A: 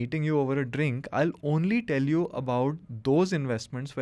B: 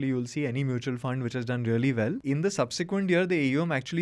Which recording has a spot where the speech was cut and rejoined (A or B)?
B